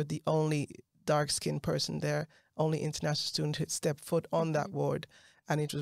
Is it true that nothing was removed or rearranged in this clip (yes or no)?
yes